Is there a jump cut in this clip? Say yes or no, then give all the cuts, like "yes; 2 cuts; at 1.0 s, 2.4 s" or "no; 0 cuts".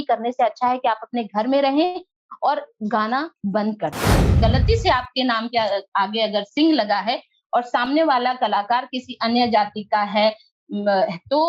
yes; 1 cut; at 4.4 s